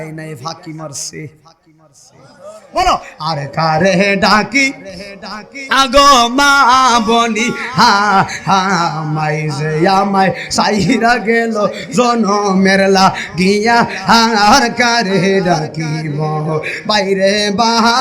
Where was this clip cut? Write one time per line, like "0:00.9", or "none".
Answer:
0:02.6